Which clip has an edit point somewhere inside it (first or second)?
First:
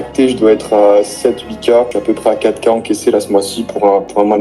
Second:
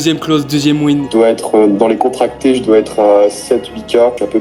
second